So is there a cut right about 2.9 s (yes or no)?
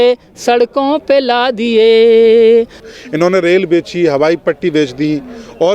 yes